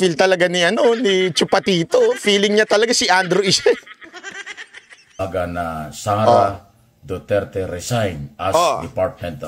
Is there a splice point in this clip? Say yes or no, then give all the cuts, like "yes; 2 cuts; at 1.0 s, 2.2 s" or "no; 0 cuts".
yes; 1 cut; at 5.2 s